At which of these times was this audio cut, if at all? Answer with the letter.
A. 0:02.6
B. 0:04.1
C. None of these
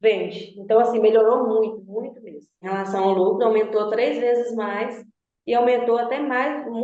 A